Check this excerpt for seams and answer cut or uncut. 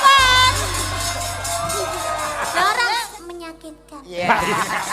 cut